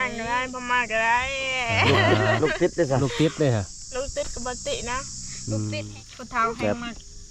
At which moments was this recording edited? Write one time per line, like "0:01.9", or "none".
0:05.8